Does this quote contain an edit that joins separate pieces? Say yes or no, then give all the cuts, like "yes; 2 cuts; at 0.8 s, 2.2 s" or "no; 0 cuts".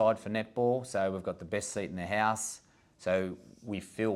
no; 0 cuts